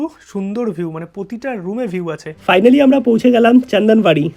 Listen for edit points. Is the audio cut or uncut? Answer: cut